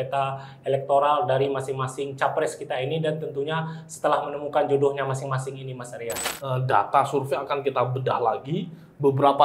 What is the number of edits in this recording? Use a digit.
1